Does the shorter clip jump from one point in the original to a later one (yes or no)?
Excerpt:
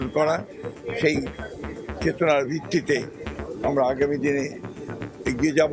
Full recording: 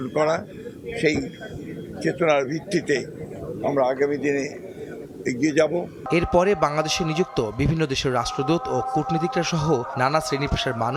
no